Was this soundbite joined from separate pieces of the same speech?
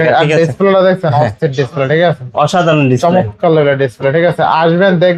no; 0 cuts

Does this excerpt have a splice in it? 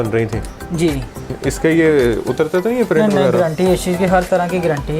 yes; 1 cut; at 1.4 s

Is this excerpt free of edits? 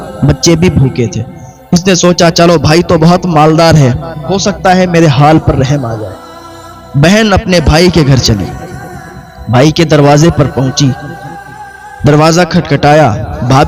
yes; 0 cuts

